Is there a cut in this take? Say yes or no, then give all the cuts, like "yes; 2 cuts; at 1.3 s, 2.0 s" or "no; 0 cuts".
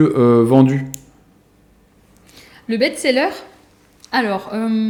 no; 0 cuts